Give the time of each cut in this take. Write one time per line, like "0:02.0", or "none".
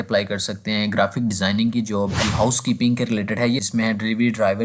0:02.2
0:03.6